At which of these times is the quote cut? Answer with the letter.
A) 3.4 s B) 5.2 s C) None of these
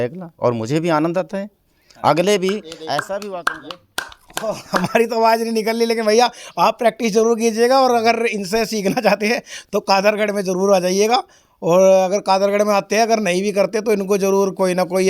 A